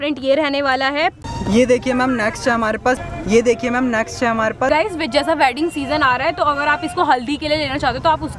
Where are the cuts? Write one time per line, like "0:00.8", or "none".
0:01.2
0:03.0
0:04.7